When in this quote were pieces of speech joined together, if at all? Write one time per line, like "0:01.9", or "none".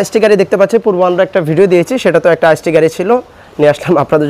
none